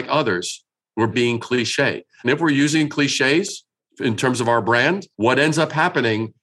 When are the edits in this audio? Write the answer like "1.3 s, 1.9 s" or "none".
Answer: 1.1 s, 5.1 s